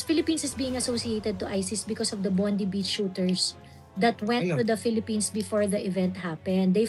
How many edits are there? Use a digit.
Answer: 0